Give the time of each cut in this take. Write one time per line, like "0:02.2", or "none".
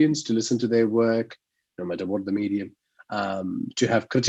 none